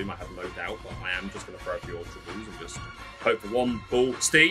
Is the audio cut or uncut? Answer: uncut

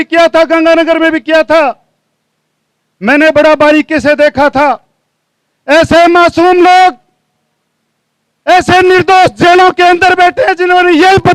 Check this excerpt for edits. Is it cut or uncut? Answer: uncut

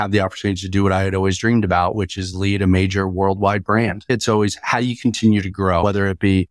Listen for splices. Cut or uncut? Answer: cut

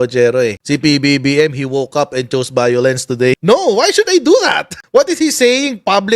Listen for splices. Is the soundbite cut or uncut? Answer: cut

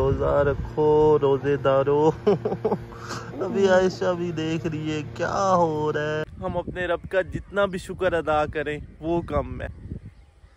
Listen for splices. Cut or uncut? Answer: cut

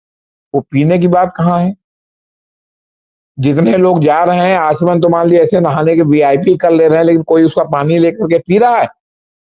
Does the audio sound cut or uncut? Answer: uncut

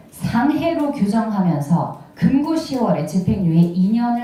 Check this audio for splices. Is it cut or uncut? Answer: uncut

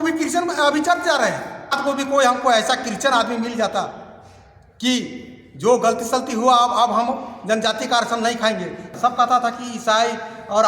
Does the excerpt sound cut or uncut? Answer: cut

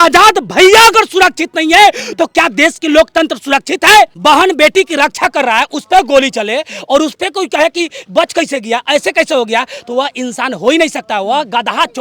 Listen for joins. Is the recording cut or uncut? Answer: cut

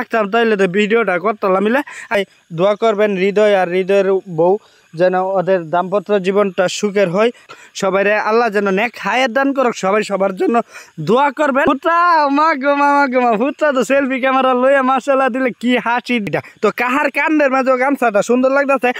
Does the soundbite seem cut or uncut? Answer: cut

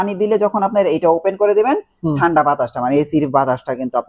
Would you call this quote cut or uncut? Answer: uncut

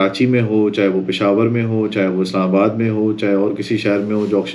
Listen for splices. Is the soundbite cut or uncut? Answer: uncut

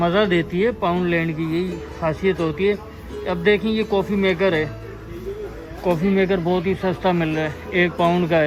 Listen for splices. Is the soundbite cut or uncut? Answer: uncut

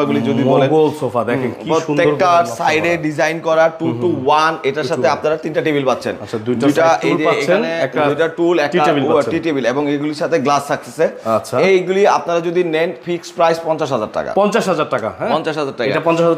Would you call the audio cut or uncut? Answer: uncut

